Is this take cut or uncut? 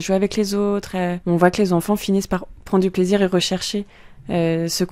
cut